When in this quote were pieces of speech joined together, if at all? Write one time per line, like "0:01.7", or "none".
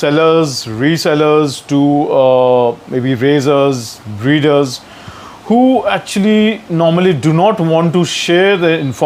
none